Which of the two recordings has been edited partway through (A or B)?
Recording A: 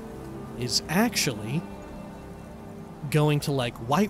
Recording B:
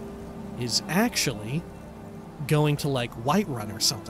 B